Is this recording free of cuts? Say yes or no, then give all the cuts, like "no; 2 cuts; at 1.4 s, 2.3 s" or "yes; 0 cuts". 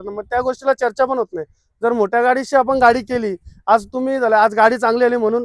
yes; 0 cuts